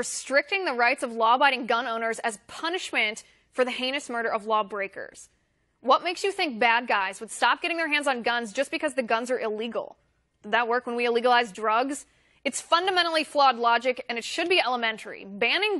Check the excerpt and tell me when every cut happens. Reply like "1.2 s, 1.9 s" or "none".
10.0 s